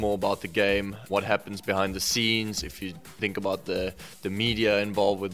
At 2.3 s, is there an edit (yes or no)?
no